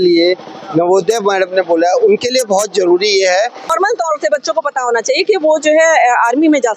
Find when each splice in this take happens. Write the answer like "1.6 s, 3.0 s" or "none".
3.7 s

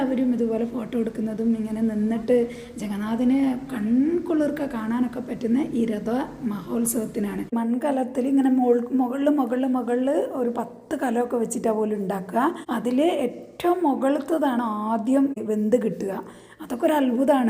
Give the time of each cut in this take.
7.5 s, 12.6 s, 15.4 s

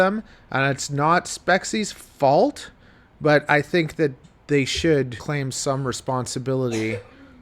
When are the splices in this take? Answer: 5.2 s

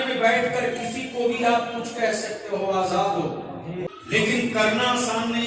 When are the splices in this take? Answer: 3.9 s

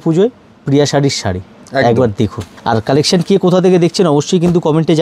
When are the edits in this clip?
2.5 s

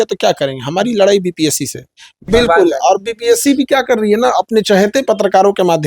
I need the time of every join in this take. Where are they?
2.1 s

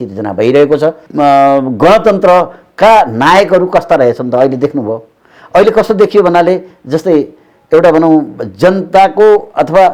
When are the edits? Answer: 1.0 s

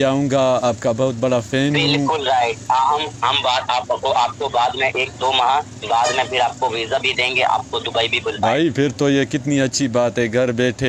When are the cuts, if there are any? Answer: none

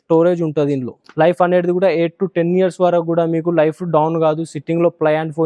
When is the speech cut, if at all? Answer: 1.0 s

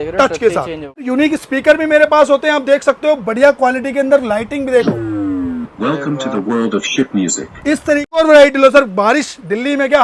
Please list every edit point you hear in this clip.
1.1 s, 8.1 s

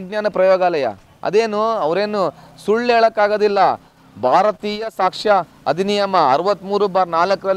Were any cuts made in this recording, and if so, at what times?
none

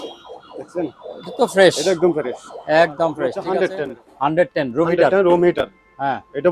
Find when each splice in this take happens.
3.4 s

